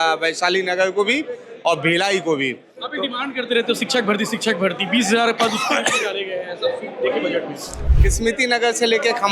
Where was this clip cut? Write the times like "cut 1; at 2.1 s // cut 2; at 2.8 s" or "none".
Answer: cut 1; at 7.7 s